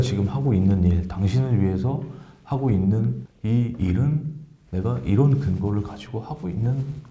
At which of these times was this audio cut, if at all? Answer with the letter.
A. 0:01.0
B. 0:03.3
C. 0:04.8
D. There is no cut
B